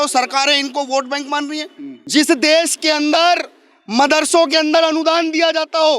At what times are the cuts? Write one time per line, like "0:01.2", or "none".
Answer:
0:02.0